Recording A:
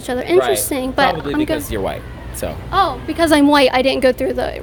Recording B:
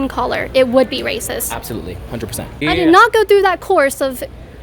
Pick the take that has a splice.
B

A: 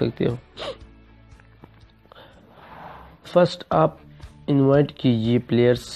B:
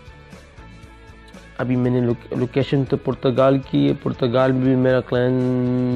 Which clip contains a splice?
B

